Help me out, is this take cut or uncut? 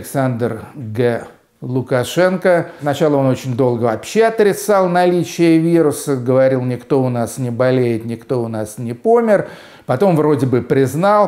cut